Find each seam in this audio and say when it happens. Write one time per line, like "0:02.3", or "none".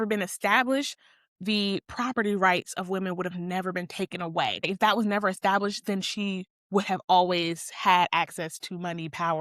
0:04.7